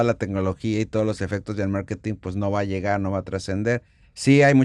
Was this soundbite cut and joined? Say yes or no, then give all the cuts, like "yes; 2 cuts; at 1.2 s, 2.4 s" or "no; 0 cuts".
no; 0 cuts